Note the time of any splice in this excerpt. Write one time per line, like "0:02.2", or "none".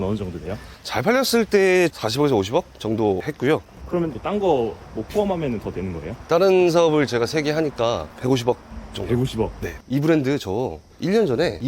0:02.0
0:03.8
0:06.1
0:09.7

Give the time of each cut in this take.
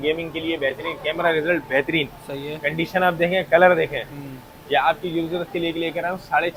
none

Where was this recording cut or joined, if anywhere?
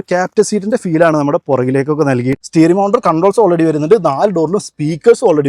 0:02.4

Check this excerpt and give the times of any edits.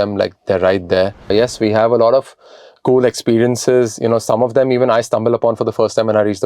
0:01.3

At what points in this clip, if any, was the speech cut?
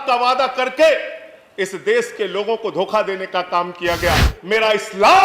0:04.3

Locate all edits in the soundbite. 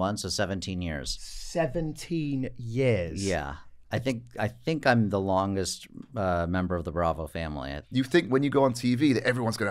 0:07.7

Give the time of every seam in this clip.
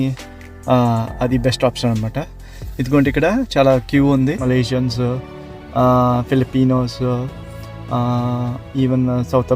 0:04.4

